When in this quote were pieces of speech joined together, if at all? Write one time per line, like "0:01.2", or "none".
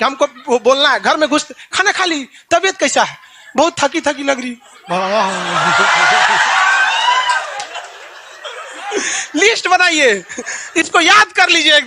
none